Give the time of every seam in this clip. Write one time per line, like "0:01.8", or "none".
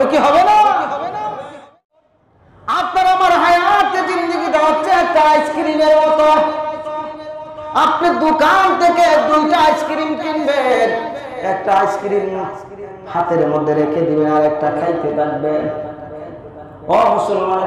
0:01.9